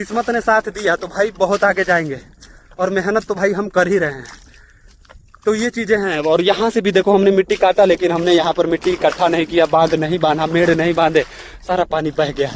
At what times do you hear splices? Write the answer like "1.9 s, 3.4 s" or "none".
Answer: none